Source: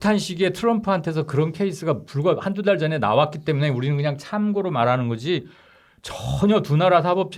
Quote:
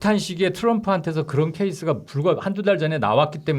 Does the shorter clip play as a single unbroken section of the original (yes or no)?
yes